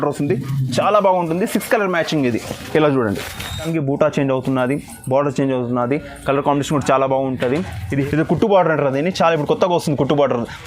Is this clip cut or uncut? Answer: cut